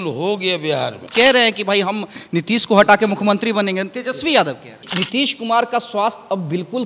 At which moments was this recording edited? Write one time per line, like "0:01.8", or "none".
0:01.1
0:04.8